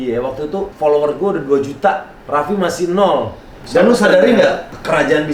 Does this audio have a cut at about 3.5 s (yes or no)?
yes